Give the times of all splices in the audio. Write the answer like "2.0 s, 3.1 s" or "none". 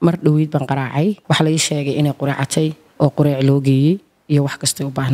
1.2 s